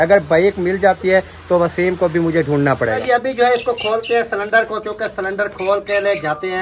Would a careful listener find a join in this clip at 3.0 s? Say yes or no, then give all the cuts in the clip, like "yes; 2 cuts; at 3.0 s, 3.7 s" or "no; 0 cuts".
yes; 1 cut; at 3.0 s